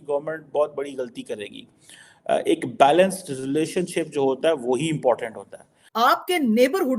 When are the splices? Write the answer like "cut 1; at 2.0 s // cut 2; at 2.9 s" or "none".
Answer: cut 1; at 5.8 s